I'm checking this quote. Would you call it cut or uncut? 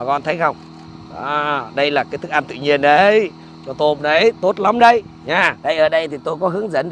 cut